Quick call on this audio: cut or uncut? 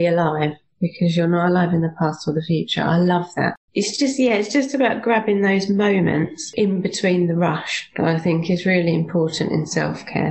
cut